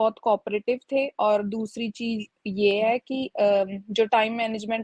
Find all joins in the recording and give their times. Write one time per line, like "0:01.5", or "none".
none